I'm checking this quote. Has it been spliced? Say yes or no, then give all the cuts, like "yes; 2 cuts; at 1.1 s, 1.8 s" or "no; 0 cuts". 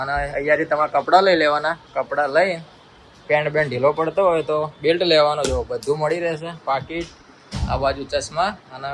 no; 0 cuts